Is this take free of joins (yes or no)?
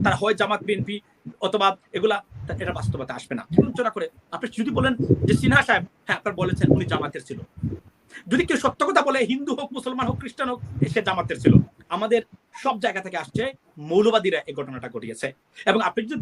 no